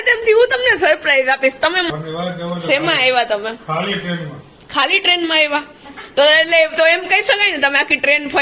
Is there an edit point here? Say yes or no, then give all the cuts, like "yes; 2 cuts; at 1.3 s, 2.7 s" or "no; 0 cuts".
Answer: yes; 1 cut; at 1.9 s